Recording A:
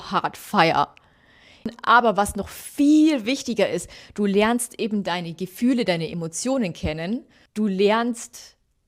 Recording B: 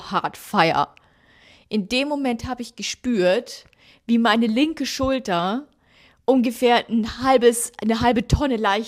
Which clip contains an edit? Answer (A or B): A